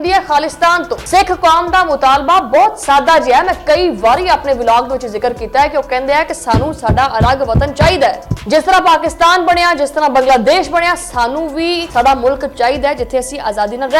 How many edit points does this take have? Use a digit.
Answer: 1